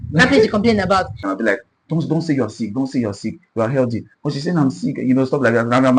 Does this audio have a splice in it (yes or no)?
yes